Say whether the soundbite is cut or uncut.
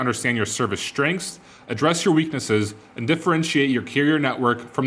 uncut